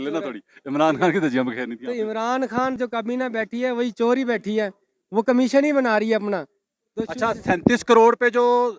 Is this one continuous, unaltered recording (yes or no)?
no